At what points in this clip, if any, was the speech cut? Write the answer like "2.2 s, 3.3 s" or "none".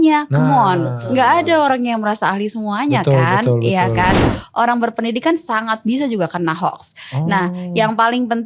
4.4 s